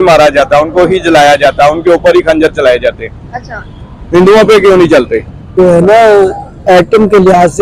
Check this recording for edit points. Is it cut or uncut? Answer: cut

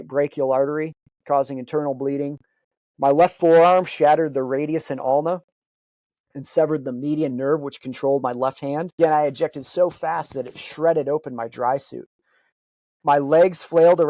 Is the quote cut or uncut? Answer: cut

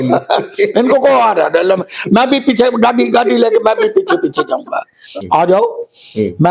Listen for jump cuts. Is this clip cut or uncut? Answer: cut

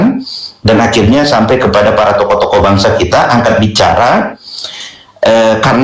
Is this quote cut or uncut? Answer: uncut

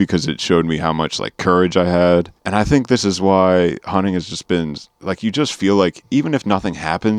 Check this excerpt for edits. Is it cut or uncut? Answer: cut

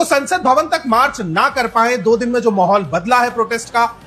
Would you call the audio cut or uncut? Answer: uncut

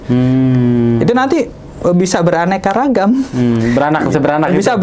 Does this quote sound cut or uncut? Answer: uncut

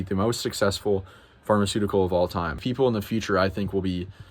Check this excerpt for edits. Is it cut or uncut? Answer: cut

